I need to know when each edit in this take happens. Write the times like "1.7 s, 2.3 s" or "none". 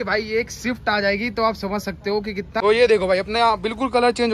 2.5 s